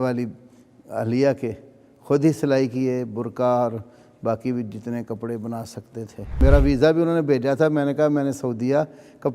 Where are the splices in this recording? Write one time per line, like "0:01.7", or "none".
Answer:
0:06.4